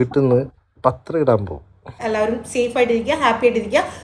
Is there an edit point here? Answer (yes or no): yes